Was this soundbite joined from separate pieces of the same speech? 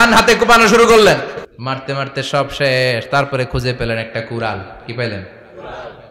yes; 1 cut; at 1.5 s

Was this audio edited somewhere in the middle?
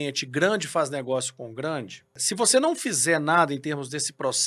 yes; 1 cut; at 2.2 s

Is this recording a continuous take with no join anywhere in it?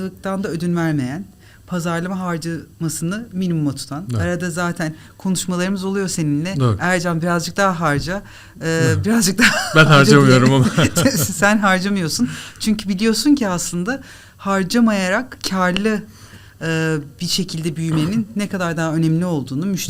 yes; 0 cuts

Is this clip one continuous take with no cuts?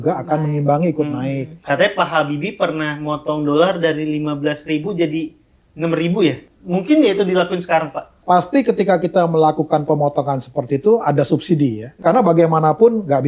no; 4 cuts; at 1.6 s, 6.5 s, 8.2 s, 11.9 s

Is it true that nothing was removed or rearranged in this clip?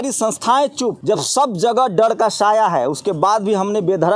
no; 1 cut; at 1.0 s

